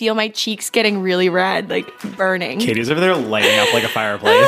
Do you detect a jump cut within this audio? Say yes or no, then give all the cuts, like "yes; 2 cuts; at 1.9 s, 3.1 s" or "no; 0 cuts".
no; 0 cuts